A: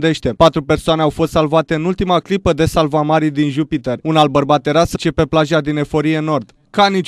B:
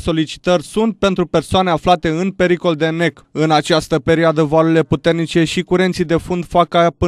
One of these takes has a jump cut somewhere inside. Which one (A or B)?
A